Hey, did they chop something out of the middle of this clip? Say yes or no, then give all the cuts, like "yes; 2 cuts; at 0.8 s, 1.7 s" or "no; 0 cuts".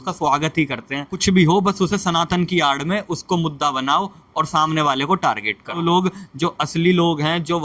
yes; 2 cuts; at 1.1 s, 5.8 s